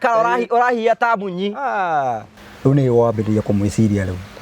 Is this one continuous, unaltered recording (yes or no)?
no